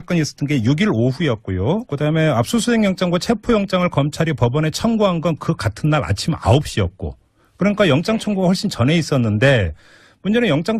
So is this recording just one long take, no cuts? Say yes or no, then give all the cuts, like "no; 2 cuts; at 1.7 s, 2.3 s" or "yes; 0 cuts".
yes; 0 cuts